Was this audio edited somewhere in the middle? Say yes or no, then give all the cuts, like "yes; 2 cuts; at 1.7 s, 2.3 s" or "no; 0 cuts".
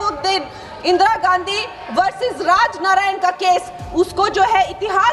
no; 0 cuts